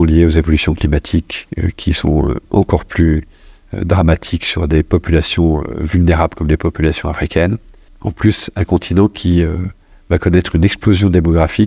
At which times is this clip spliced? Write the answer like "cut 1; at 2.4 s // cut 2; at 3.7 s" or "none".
none